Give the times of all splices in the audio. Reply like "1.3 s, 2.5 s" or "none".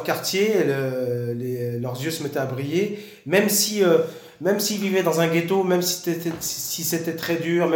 none